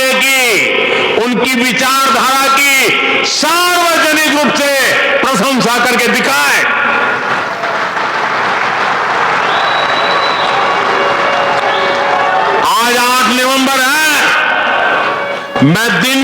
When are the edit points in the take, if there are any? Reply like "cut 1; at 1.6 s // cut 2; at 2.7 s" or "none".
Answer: none